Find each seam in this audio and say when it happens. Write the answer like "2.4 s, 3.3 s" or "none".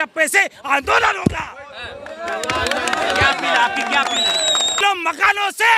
4.8 s